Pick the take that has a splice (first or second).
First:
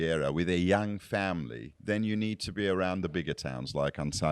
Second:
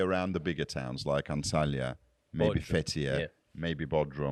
first